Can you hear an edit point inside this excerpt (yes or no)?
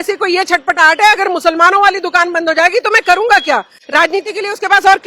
no